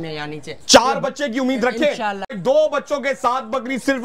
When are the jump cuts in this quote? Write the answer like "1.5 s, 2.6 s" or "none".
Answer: 2.3 s